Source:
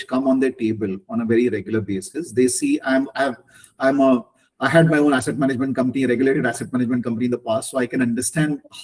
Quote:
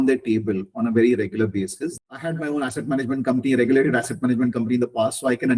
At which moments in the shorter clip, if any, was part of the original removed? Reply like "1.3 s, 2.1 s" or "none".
1.8 s